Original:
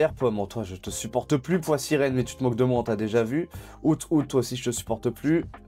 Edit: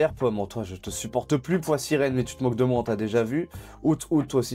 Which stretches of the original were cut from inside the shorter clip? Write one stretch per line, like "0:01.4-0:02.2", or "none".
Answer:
none